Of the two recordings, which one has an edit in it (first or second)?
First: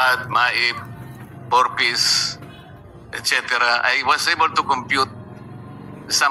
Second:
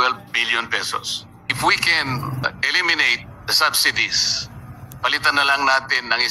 second